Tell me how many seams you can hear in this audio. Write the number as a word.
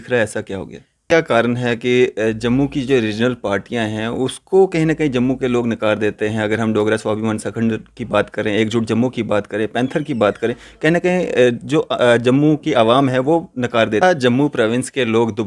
two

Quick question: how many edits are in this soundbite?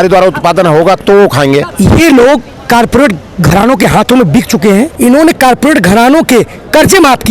two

